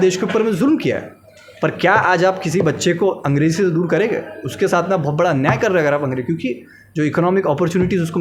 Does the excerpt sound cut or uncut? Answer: uncut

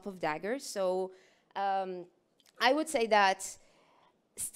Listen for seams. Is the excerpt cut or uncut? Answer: uncut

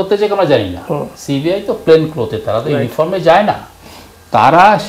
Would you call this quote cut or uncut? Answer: uncut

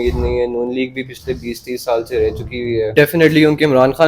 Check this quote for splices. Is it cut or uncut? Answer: cut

